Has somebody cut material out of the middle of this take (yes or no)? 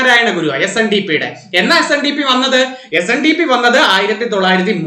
no